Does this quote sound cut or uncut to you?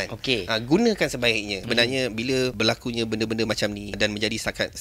cut